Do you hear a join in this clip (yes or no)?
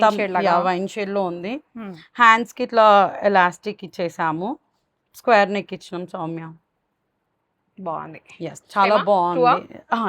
no